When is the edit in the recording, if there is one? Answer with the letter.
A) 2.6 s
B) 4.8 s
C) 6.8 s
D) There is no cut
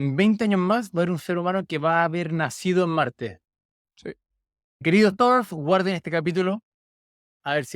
B